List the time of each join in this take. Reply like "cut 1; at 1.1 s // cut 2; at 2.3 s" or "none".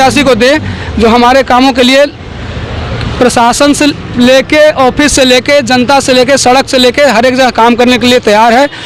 none